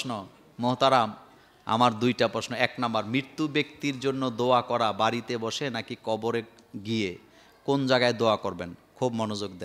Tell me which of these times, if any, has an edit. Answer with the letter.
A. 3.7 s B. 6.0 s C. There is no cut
C